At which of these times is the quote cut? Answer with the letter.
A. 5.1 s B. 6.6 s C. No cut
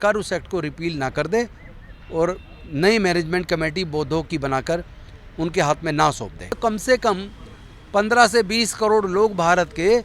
B